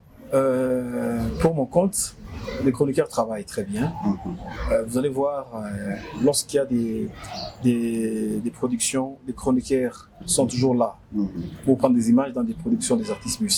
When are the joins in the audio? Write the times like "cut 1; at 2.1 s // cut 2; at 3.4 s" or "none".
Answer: none